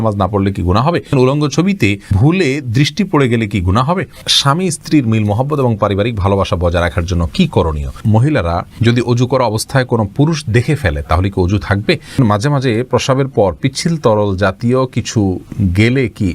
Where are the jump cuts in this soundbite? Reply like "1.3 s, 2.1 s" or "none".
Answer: 1.1 s, 2.1 s, 4.3 s, 8.0 s, 12.2 s